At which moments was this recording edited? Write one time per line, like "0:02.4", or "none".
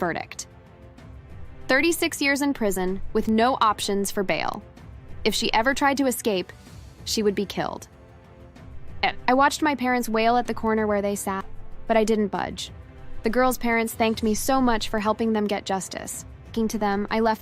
0:16.5